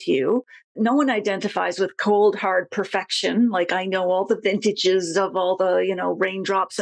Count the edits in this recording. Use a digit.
0